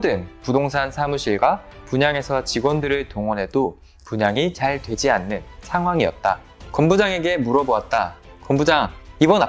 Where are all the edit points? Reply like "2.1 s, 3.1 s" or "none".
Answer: 6.5 s